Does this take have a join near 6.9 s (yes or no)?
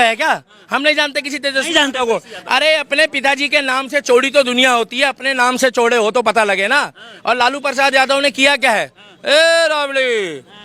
no